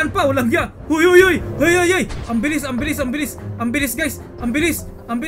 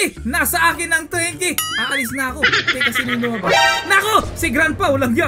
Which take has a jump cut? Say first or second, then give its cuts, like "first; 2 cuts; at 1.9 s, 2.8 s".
second; 1 cut; at 1.7 s